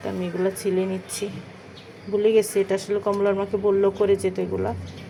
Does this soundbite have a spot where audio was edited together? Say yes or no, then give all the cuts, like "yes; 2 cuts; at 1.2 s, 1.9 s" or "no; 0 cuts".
no; 0 cuts